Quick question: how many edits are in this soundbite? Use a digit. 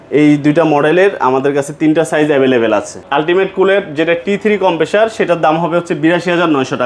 1